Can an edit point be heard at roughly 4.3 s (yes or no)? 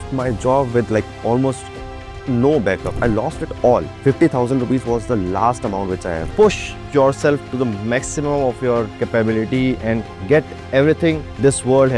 no